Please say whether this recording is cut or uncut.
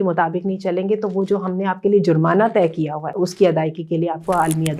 cut